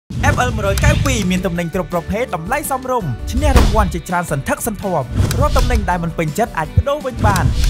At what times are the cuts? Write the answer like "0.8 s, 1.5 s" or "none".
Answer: none